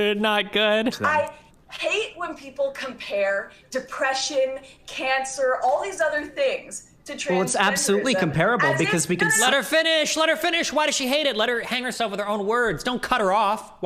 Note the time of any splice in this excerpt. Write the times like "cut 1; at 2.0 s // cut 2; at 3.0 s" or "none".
cut 1; at 1.0 s